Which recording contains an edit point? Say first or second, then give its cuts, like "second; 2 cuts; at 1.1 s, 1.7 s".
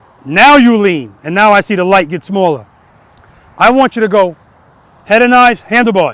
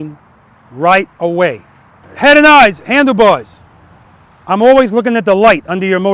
second; 1 cut; at 2.1 s